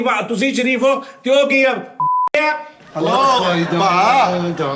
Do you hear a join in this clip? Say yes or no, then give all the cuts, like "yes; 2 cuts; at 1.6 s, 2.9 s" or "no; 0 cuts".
no; 0 cuts